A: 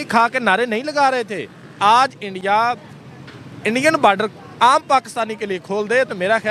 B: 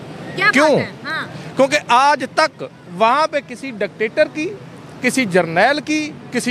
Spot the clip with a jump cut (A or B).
A